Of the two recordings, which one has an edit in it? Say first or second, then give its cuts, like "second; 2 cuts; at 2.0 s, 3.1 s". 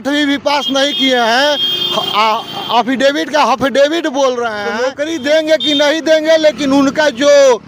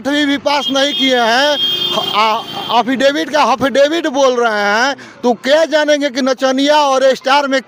first; 1 cut; at 4.7 s